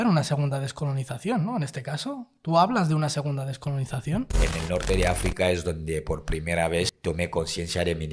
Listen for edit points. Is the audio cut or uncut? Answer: cut